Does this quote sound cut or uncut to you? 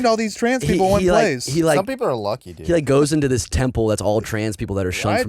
uncut